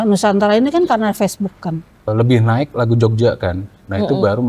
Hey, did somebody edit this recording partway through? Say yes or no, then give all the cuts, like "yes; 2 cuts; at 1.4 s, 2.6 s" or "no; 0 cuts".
yes; 1 cut; at 2.1 s